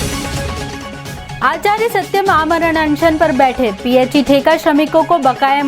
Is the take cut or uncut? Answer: cut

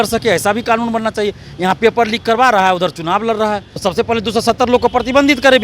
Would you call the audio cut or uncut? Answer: cut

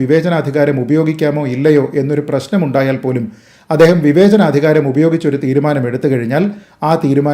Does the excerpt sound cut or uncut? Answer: uncut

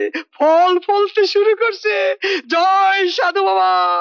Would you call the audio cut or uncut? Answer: uncut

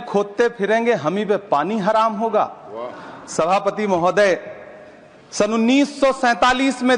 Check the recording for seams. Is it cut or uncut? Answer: uncut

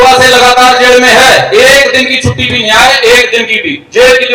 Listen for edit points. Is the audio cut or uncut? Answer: uncut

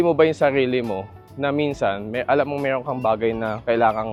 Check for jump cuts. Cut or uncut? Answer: uncut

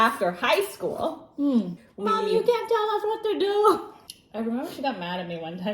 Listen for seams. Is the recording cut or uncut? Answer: cut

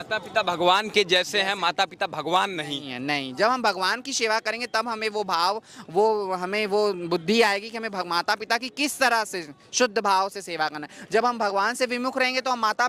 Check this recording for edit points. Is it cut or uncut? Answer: uncut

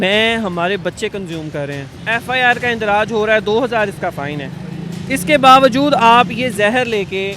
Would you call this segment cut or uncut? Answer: cut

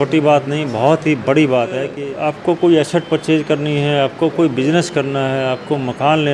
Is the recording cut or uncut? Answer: cut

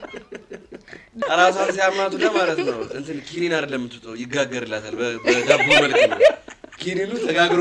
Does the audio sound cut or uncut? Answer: cut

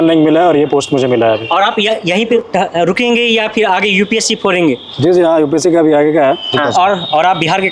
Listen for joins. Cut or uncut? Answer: uncut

